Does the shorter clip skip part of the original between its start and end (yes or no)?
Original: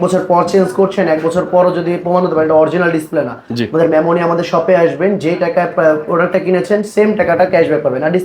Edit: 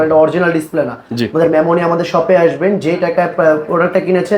no